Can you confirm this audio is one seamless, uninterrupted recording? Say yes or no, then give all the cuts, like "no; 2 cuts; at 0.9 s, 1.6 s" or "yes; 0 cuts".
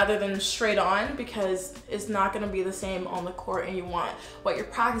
yes; 0 cuts